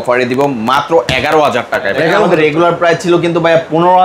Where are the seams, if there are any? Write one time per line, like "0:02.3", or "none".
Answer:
0:02.3